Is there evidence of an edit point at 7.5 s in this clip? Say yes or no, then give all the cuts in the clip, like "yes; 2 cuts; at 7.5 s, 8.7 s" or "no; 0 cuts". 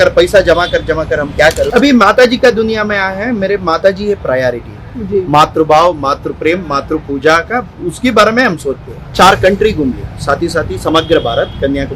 no; 2 cuts; at 1.7 s, 9.1 s